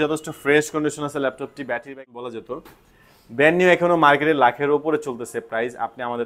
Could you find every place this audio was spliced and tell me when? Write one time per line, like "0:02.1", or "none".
0:01.9